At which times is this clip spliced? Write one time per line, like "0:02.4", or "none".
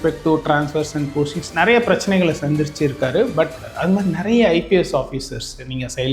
0:03.6

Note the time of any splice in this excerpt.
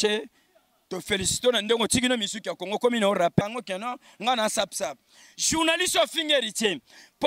0:03.4

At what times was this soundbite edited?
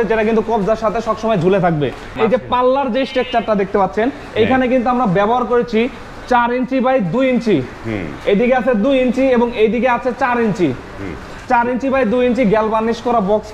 0:02.2

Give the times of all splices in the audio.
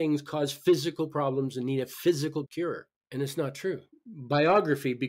0:03.9

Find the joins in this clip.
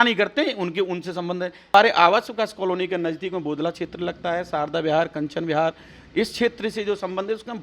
0:01.7

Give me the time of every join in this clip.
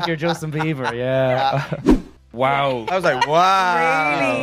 0:02.2

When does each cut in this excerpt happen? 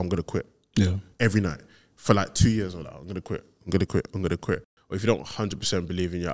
0:04.8

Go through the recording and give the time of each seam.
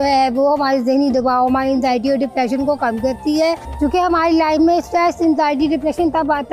none

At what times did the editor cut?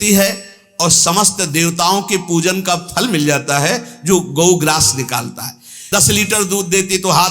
0:05.7

